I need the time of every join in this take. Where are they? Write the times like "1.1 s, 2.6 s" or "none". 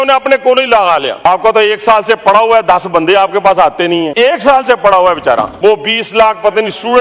1.3 s, 4.1 s, 5.5 s